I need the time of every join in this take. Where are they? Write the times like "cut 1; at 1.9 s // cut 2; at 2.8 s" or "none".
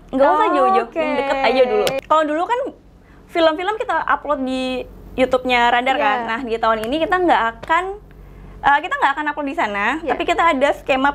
cut 1; at 1.9 s